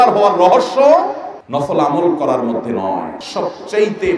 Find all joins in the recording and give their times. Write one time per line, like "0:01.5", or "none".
0:03.2